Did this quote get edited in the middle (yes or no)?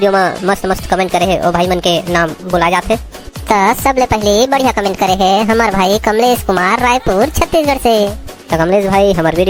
no